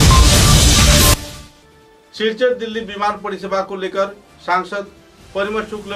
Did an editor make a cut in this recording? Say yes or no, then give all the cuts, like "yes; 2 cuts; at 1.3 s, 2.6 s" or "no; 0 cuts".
yes; 1 cut; at 1.1 s